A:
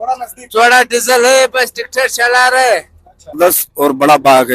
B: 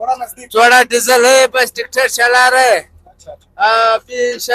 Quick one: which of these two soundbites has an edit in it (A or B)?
A